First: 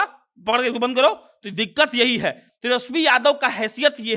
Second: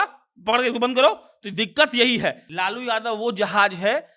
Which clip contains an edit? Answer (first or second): second